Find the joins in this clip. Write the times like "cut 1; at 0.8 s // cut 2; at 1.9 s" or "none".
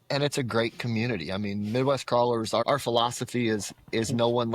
cut 1; at 2.6 s